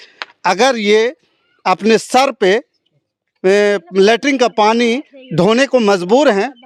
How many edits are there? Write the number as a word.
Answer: zero